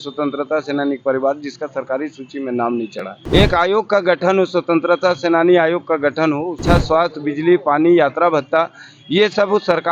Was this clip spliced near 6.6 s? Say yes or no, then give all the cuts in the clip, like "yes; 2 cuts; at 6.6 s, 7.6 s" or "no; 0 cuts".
yes; 2 cuts; at 3.1 s, 6.6 s